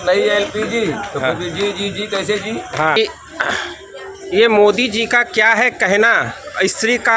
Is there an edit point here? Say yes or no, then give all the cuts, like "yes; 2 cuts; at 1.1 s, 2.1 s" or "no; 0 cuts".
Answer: yes; 1 cut; at 3.0 s